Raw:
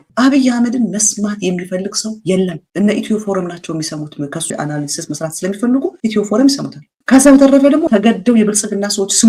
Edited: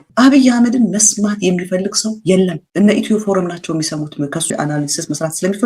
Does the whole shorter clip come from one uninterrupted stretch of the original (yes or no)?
yes